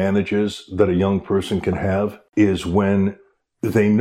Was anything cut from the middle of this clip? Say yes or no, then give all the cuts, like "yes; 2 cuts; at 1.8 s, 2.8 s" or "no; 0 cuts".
yes; 1 cut; at 2.2 s